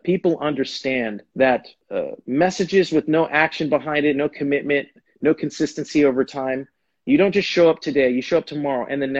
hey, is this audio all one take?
no; 2 cuts; at 1.2 s, 1.8 s

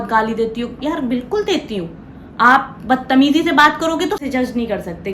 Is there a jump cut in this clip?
yes; 1 cut; at 4.2 s

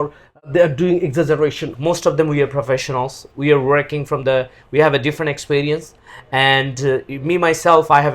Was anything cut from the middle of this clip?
yes; 1 cut; at 1.7 s

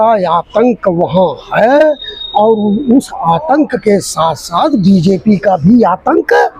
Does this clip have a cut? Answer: no; 0 cuts

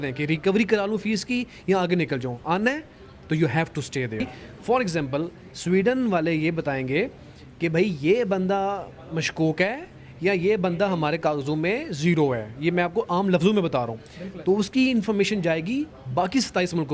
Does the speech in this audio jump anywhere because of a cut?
yes; 1 cut; at 4.4 s

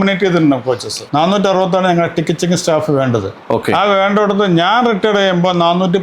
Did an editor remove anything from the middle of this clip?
yes; 1 cut; at 1.0 s

